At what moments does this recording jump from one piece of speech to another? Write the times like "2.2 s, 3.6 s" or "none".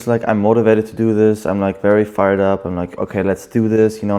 none